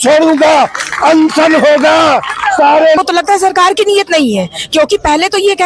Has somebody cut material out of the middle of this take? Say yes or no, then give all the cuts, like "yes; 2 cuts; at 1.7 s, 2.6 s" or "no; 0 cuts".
yes; 1 cut; at 3.0 s